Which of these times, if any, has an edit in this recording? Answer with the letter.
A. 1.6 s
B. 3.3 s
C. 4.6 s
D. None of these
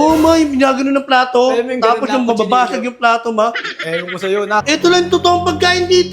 C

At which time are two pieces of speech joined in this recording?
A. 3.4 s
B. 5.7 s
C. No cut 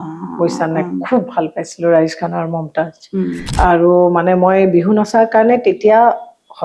A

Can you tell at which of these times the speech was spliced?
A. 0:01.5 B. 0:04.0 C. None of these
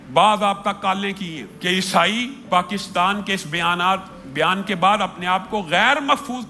A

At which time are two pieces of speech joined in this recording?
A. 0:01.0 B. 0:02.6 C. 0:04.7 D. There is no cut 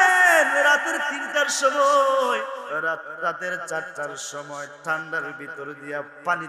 B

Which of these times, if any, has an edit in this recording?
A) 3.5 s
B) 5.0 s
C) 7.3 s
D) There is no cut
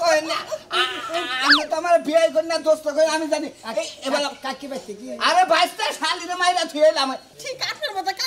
C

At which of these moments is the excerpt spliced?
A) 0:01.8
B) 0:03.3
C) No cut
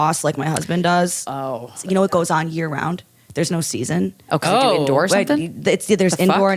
A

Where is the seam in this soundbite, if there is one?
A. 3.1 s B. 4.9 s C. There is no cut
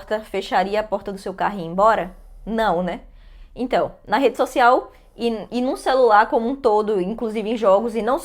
C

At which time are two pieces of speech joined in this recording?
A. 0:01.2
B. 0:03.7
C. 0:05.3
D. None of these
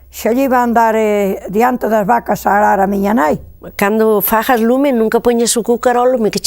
B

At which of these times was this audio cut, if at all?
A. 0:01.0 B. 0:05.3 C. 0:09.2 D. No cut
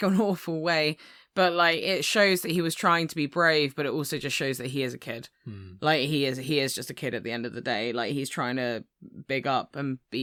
D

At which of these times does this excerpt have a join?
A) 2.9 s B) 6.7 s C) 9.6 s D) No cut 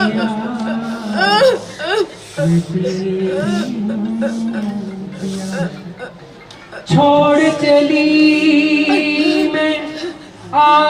D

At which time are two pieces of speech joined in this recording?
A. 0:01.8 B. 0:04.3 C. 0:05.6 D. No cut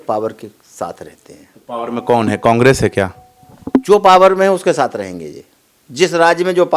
A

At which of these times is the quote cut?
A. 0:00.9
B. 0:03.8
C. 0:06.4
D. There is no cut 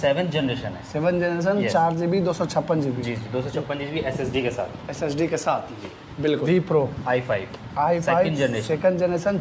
C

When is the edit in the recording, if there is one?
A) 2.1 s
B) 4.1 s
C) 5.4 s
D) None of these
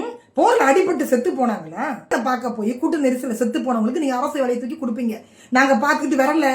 A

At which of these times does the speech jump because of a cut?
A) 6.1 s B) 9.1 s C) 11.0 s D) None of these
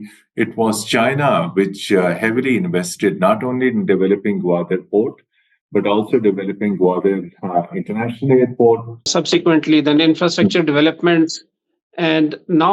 B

